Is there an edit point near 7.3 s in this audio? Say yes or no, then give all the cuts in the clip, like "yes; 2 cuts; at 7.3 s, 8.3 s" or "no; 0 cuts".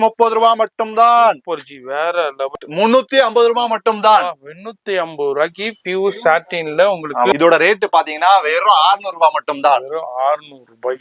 yes; 2 cuts; at 2.6 s, 7.3 s